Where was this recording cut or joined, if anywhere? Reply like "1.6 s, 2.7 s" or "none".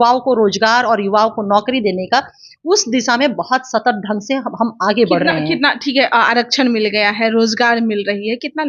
none